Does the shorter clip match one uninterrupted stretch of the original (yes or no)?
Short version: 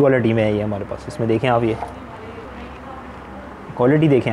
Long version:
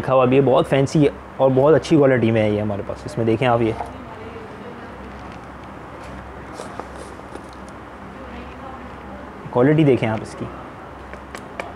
no